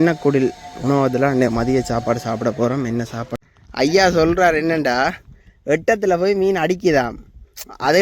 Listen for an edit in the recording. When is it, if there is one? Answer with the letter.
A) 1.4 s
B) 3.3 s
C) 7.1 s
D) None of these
B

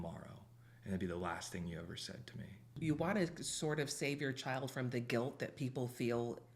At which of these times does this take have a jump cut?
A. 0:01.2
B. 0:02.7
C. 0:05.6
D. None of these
B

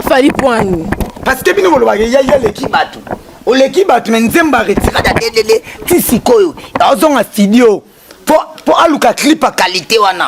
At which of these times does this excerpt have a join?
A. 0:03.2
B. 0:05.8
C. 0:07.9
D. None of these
D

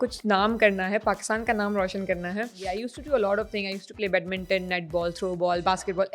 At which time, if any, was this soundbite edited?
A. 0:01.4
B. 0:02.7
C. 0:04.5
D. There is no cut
B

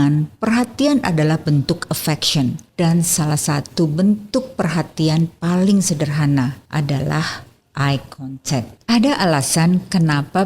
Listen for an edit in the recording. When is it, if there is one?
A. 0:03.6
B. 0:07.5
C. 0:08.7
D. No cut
C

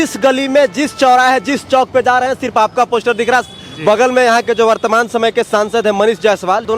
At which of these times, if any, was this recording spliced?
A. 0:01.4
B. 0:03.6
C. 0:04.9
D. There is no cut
D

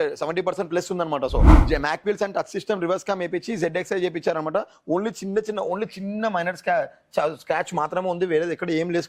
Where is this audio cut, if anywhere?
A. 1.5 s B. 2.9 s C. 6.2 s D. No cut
A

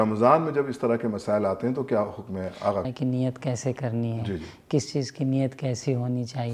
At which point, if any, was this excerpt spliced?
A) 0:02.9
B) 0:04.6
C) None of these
A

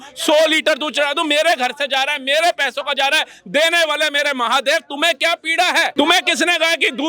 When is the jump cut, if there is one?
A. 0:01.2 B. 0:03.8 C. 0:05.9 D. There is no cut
C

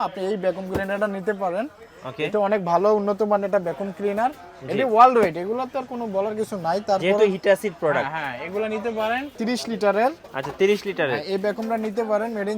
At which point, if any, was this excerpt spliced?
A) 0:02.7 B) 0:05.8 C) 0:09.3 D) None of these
C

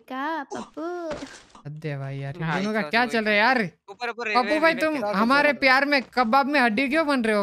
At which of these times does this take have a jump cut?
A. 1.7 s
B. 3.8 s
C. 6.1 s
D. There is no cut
A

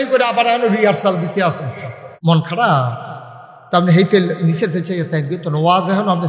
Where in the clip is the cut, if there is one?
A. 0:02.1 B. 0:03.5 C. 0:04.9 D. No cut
A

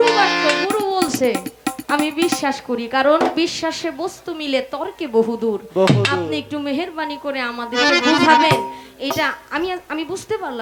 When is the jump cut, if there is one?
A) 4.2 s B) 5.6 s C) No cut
C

